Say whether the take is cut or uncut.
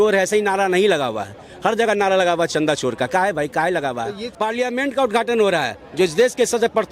cut